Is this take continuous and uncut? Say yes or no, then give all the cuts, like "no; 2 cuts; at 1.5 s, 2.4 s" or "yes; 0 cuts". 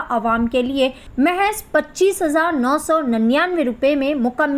no; 1 cut; at 1.0 s